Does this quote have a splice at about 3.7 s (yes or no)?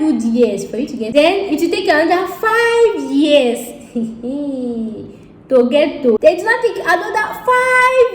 no